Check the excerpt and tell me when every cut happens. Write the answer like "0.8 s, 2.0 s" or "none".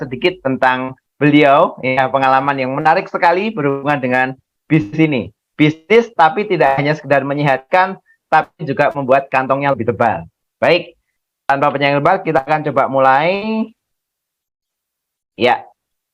none